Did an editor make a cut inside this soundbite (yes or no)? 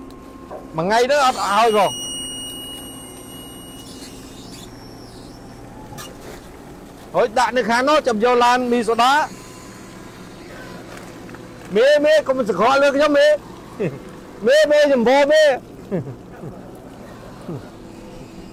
no